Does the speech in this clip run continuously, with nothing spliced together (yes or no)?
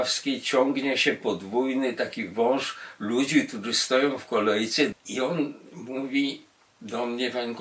no